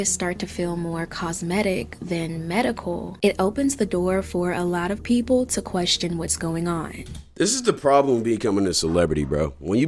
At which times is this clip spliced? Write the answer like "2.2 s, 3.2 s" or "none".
none